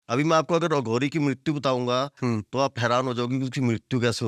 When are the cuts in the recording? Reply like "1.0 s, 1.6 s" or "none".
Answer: none